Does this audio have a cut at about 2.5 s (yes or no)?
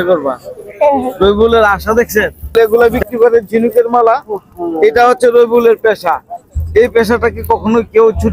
yes